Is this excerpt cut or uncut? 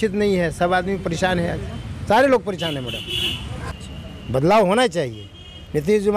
cut